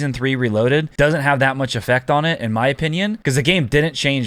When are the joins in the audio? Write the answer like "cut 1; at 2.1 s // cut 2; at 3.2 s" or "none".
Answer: cut 1; at 0.9 s // cut 2; at 3.2 s